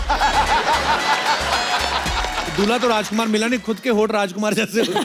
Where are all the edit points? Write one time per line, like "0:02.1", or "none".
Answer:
none